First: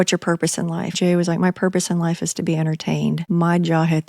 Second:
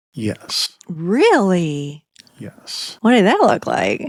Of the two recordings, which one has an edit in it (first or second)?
first